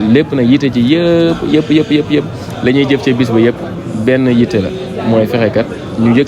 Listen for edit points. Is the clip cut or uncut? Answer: uncut